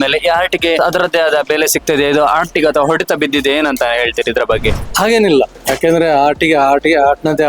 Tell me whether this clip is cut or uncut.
cut